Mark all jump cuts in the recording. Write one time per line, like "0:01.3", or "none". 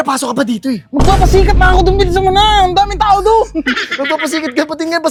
none